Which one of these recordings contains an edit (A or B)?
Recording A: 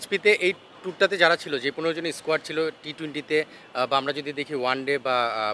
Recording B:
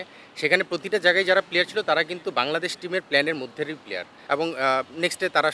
B